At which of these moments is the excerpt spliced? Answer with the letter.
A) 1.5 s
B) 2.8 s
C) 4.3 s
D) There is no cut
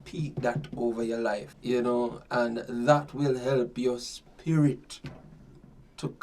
A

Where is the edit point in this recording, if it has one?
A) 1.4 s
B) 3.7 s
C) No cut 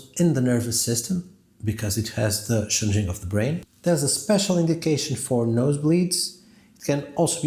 C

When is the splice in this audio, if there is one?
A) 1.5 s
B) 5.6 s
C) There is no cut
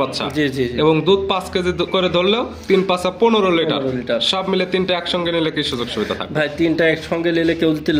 C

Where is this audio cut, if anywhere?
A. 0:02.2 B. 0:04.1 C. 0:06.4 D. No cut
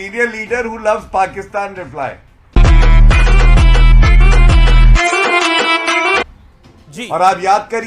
C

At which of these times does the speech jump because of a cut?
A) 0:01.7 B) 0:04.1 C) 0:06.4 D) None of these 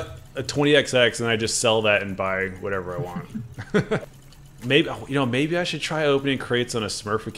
B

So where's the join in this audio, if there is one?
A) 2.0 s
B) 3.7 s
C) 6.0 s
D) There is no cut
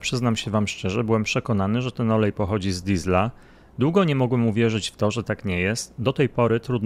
D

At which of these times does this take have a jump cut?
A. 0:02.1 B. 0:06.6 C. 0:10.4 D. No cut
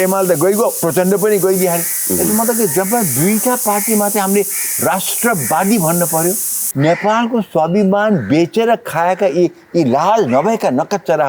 B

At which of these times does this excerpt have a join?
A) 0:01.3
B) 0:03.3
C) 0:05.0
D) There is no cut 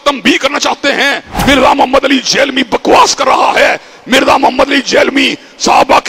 A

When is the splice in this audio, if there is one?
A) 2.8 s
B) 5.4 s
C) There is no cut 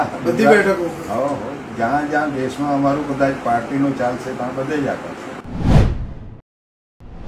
B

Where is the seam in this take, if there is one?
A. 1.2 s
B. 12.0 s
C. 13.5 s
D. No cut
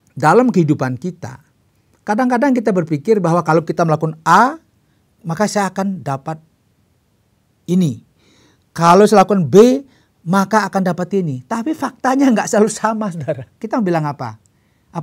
C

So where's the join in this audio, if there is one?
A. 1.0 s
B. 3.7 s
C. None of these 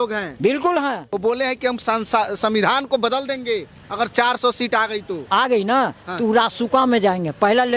A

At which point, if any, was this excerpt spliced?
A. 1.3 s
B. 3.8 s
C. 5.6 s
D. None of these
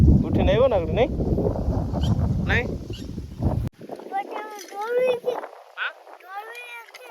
B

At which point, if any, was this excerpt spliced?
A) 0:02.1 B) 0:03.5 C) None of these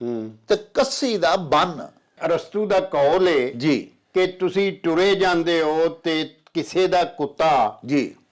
A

